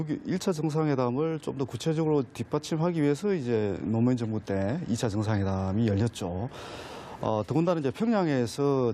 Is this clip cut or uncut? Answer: cut